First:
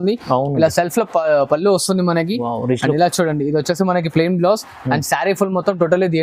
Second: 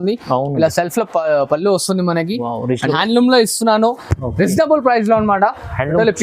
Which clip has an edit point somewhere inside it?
second; 1 cut; at 2.9 s

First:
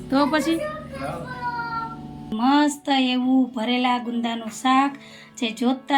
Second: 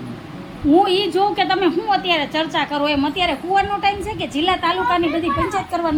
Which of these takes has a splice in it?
first; 1 cut; at 2.3 s

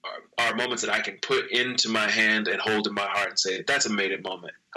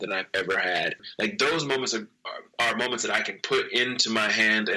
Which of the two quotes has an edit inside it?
second; 1 cut; at 1.1 s

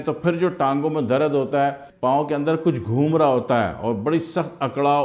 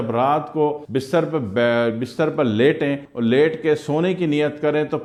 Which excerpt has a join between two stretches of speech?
first; 1 cut; at 1.9 s

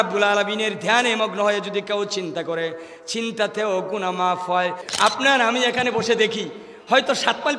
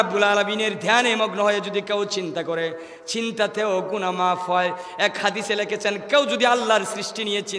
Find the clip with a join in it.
first; 1 cut; at 4.8 s

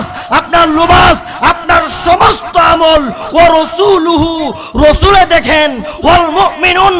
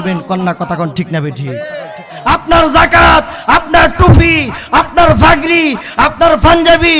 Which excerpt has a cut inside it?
second; 1 cut; at 2.1 s

